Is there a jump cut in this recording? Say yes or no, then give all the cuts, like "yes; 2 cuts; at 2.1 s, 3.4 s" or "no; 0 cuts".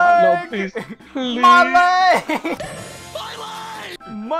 yes; 1 cut; at 2.6 s